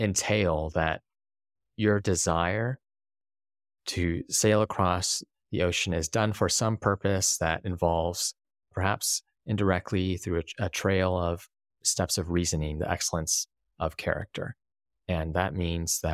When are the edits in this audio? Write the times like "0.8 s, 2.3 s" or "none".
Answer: none

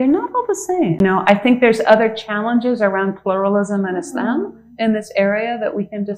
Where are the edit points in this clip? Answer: 1.0 s

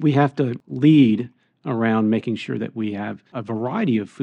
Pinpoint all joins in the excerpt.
3.3 s

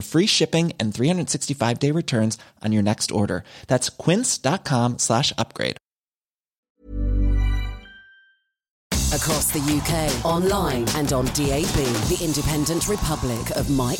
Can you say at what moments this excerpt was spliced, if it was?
8.9 s

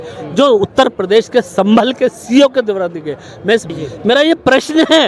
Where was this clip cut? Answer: 3.7 s

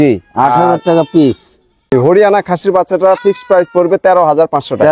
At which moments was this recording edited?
1.9 s

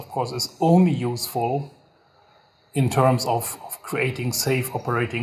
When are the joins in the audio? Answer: none

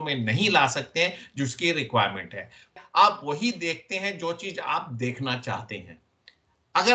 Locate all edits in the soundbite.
2.8 s

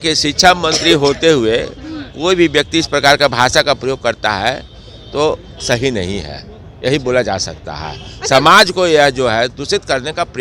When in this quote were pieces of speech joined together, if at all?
none

